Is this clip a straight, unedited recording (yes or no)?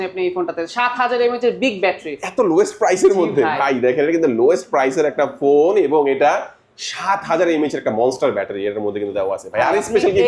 yes